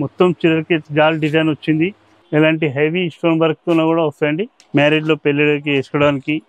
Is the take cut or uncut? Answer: cut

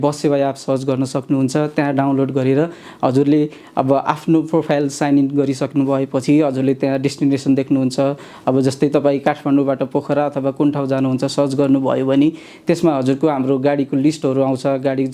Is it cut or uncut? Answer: uncut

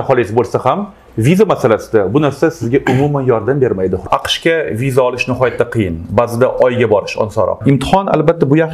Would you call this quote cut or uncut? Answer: cut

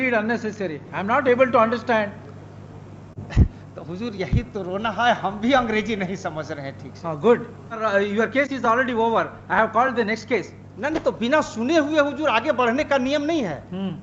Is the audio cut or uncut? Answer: cut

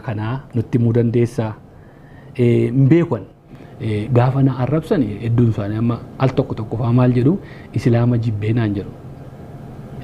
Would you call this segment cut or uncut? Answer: cut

